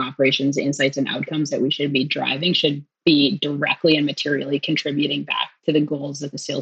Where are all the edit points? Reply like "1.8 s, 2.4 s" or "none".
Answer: 2.9 s